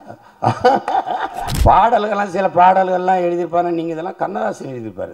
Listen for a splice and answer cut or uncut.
cut